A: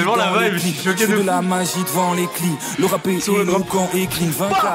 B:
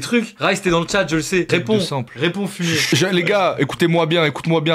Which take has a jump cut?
B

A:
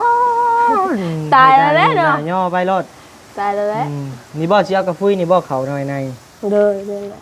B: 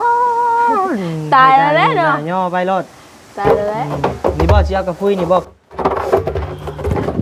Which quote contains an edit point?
B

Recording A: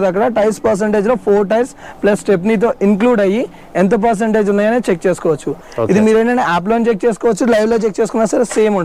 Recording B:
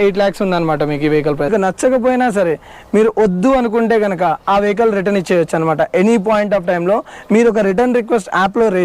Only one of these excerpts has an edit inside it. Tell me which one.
B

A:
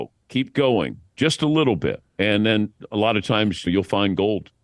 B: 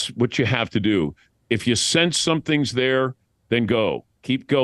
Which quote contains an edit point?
A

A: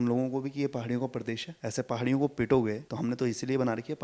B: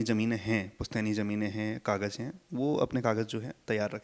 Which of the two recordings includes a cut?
A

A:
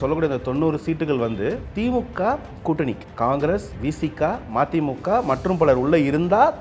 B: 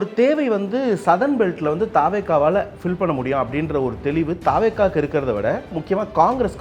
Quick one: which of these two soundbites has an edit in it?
B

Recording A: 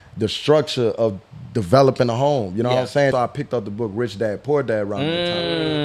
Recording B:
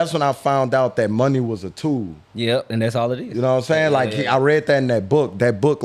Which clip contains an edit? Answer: A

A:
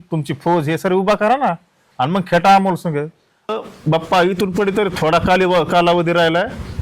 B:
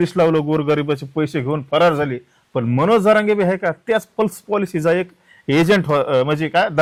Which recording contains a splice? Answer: A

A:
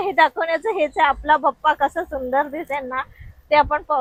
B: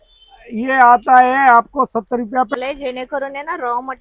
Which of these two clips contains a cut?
B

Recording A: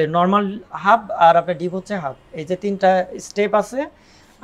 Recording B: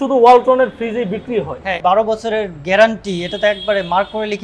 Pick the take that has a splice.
B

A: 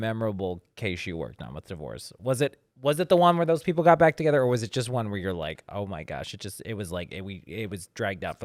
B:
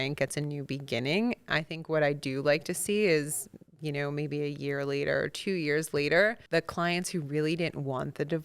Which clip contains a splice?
B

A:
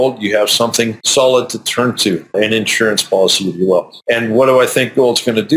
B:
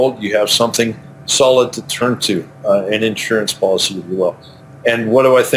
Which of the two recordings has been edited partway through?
A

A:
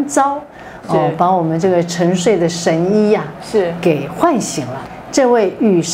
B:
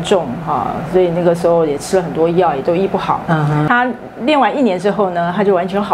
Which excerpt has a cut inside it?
B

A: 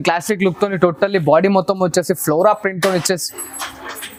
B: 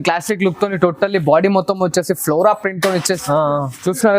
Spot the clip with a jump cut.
B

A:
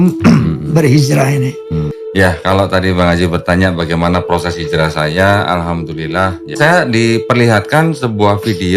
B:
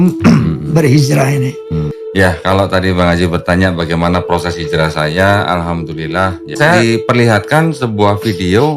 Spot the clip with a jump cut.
B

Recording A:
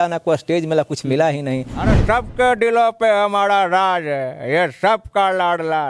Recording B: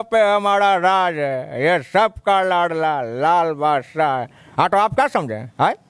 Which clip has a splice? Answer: A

